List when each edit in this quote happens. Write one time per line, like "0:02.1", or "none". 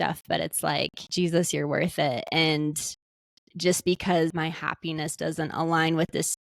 0:01.0
0:04.3